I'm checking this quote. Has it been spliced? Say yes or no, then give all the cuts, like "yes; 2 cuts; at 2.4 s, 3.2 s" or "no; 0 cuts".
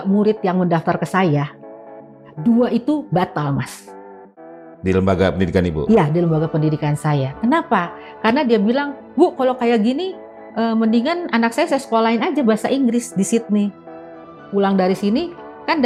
no; 0 cuts